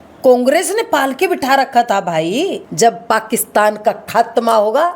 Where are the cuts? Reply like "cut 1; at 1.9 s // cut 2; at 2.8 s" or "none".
cut 1; at 2.6 s